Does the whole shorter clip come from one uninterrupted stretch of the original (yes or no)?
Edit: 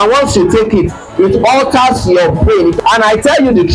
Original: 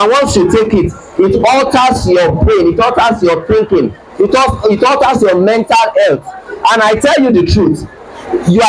no